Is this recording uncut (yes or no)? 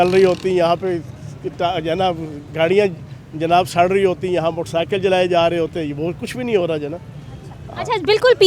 yes